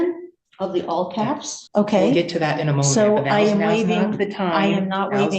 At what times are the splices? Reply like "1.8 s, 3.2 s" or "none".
1.6 s